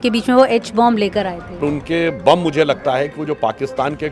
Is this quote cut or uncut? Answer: cut